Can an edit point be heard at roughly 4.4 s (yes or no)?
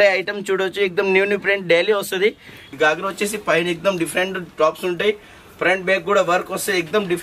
no